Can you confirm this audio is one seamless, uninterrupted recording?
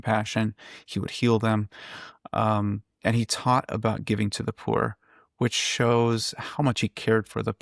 yes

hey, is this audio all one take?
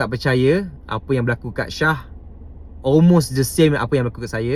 yes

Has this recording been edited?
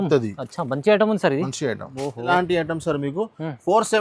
yes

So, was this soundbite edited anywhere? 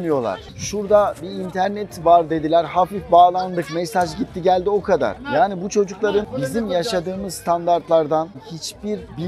yes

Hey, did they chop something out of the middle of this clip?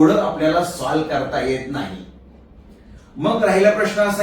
no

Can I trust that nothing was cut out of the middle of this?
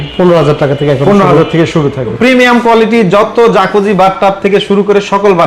no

